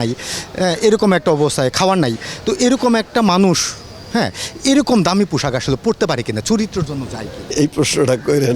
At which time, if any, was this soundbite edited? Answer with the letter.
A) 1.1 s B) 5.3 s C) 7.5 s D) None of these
C